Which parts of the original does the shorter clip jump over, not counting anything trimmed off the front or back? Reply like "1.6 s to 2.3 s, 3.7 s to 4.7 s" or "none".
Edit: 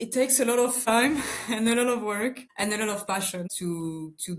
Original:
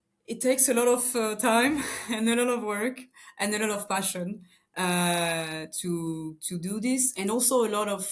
1.2 s to 1.5 s, 3.1 s to 3.3 s, 4.3 s to 5.7 s

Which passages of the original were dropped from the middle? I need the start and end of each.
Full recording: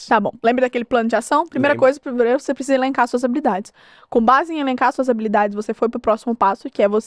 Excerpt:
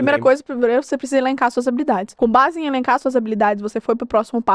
3.6 s to 4.0 s

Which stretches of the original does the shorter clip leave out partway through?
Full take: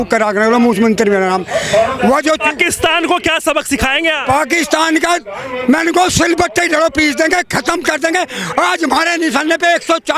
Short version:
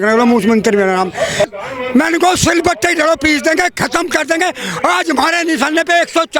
1.8 s to 5.2 s

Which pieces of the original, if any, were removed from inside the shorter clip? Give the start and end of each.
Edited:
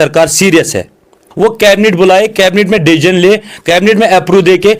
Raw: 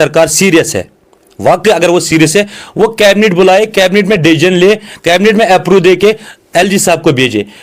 1.4 s to 2.7 s

